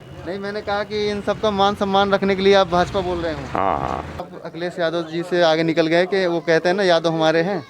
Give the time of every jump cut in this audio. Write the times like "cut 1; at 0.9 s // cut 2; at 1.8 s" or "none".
cut 1; at 4.3 s